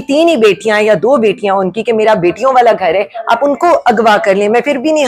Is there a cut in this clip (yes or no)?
no